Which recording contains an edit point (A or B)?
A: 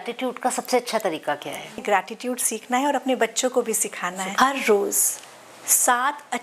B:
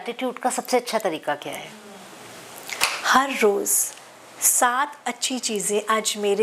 A